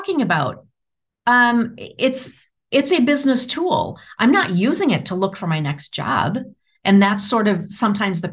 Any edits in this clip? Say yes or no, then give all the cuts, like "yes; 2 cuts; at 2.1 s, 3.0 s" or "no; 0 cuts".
no; 0 cuts